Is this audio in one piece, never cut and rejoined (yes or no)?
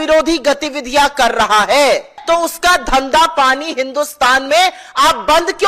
no